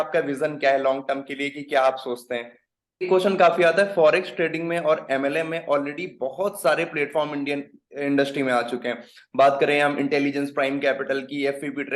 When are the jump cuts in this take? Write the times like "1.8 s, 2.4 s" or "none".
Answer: 3.1 s